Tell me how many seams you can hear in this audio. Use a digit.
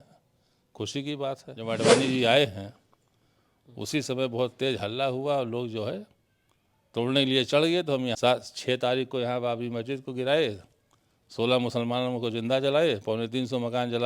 2